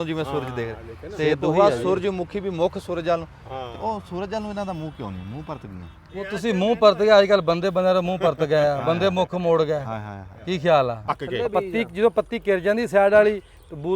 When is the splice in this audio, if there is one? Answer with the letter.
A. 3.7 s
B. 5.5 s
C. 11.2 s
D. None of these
C